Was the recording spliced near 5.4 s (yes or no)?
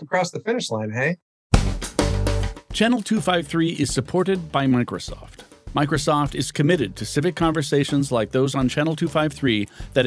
no